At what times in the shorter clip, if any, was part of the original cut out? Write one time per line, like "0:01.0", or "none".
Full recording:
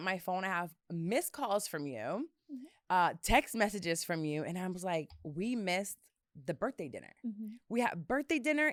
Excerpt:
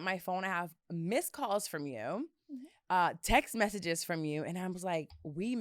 none